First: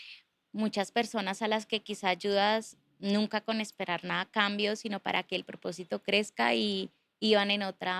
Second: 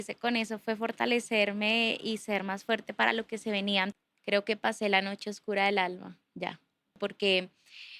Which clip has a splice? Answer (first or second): second